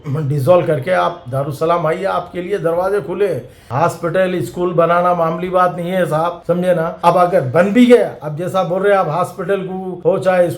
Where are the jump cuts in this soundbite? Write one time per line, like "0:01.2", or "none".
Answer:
none